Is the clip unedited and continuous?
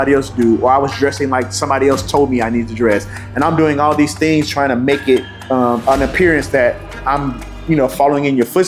yes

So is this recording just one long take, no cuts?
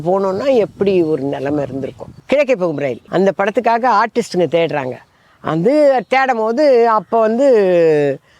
no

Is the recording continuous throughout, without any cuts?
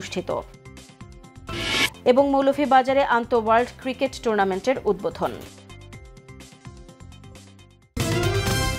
no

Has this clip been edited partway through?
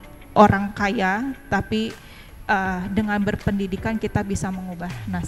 no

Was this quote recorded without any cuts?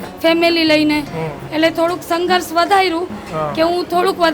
no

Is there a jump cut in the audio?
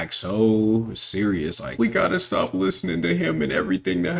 yes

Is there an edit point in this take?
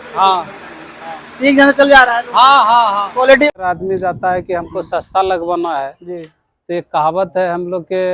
yes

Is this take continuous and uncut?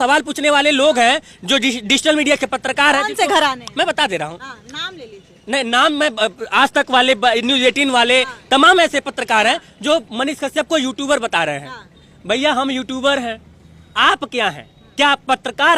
yes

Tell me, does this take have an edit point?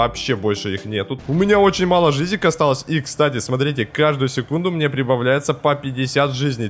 yes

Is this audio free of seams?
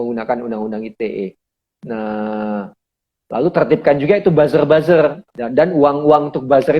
no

